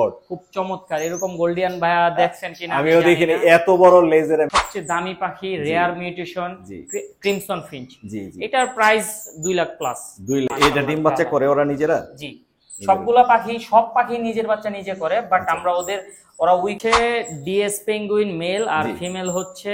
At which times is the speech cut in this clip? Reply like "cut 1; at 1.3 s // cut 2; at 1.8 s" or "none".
cut 1; at 4.5 s // cut 2; at 10.5 s // cut 3; at 16.8 s